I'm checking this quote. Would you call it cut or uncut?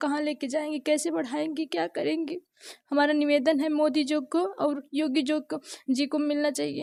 uncut